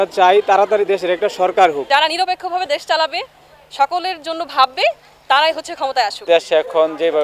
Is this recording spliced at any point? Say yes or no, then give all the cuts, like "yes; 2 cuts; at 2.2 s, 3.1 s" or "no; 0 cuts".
yes; 2 cuts; at 1.8 s, 6.3 s